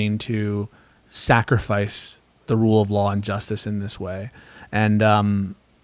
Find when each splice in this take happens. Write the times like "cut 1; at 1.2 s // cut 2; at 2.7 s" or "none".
none